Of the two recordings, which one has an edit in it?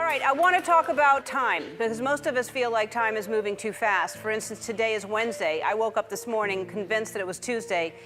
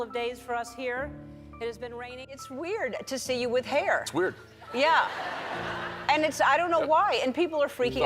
second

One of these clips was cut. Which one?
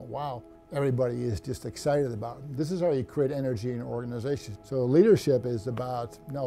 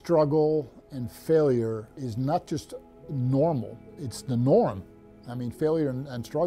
first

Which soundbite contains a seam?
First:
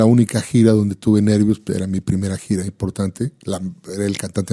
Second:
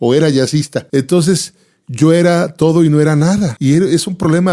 second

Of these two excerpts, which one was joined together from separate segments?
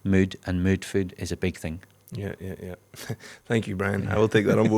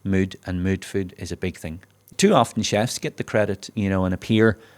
second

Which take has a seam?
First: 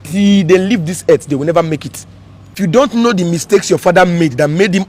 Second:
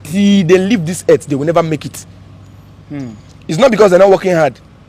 first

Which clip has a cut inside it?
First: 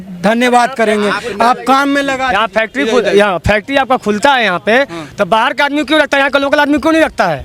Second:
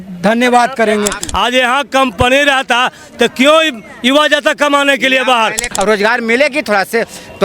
second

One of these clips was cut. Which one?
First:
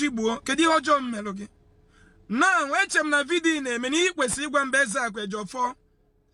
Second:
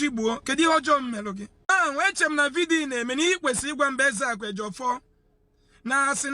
second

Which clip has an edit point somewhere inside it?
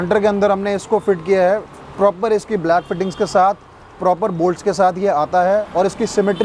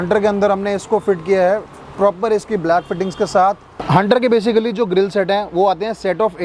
second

